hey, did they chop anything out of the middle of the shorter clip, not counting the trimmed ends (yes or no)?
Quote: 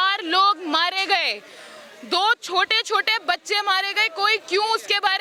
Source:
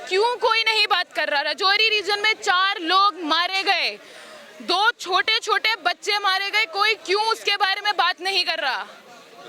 no